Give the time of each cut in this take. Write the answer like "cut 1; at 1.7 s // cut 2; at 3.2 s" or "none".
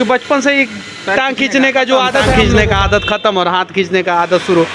cut 1; at 2.3 s